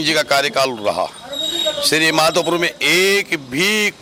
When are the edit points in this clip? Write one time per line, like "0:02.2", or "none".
none